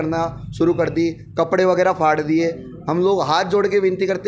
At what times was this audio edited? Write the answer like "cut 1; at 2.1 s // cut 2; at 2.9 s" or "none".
none